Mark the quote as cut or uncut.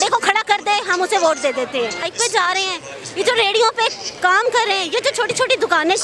cut